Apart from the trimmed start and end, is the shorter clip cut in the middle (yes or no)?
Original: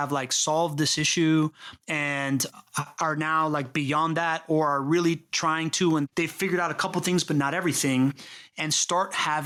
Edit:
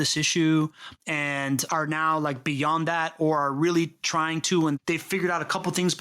yes